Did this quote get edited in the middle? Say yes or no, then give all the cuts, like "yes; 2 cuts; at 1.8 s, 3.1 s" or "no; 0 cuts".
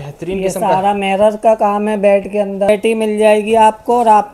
yes; 1 cut; at 2.7 s